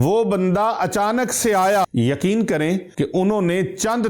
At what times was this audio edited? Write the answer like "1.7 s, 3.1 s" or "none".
1.9 s, 2.9 s

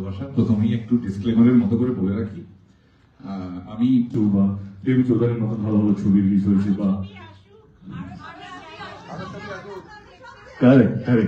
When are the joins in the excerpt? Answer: 4.1 s

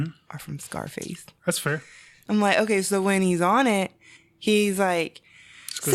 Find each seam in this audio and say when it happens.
2.1 s

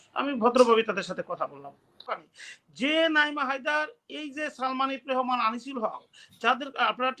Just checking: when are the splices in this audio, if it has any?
2.2 s

